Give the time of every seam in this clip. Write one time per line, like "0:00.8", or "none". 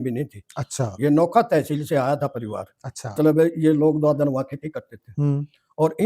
0:03.1

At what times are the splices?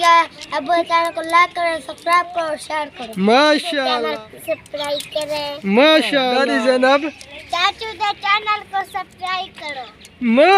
0:03.9
0:06.4

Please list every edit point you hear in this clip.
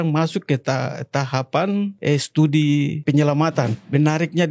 0:02.0
0:03.3

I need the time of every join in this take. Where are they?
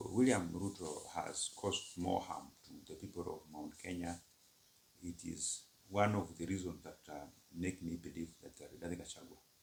none

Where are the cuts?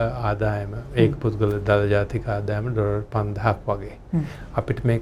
none

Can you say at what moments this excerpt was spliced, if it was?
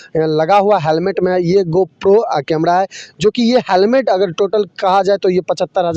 none

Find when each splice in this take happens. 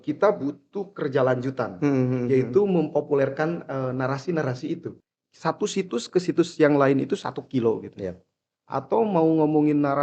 0:04.9

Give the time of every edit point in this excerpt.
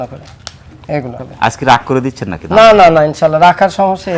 0:01.1

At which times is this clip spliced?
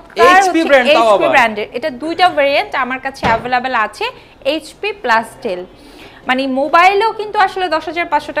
none

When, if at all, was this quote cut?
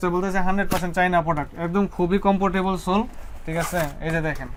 none

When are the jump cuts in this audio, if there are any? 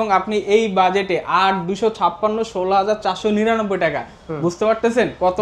none

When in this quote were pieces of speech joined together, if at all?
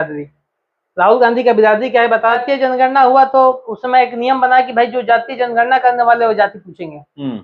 0:02.4

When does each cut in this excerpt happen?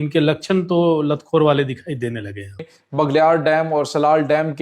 0:02.9

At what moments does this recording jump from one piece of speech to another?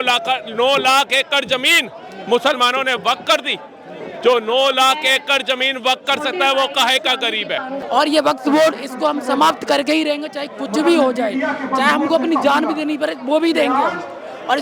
0:07.8

